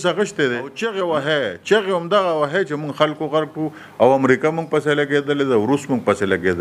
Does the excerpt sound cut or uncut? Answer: cut